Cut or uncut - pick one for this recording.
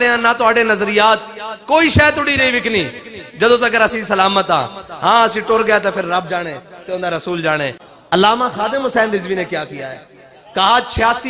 cut